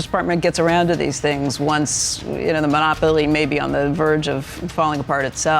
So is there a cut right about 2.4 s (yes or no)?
no